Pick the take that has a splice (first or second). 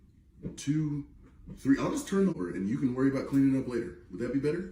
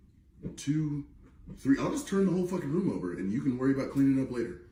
first